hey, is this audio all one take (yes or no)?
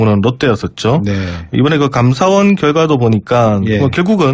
no